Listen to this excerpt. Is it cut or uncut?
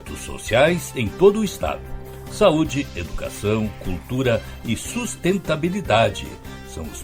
uncut